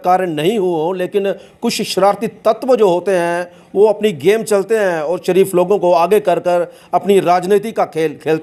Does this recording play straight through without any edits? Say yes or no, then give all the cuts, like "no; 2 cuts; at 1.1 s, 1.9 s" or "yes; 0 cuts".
yes; 0 cuts